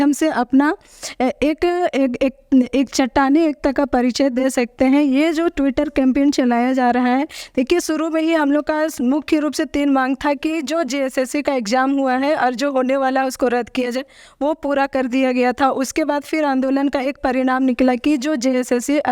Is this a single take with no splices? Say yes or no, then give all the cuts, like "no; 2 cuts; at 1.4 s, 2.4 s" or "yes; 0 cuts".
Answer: yes; 0 cuts